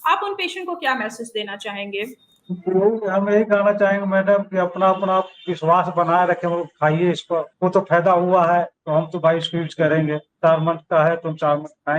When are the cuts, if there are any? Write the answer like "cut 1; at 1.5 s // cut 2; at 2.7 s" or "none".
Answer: cut 1; at 7.5 s // cut 2; at 8.8 s // cut 3; at 10.3 s